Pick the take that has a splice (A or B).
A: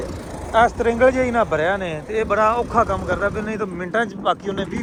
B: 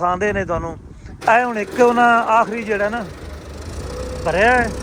B